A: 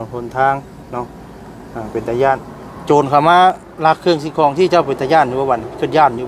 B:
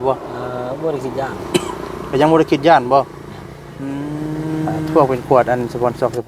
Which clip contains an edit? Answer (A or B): B